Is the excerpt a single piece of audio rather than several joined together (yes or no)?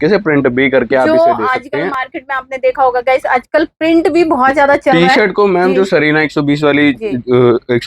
yes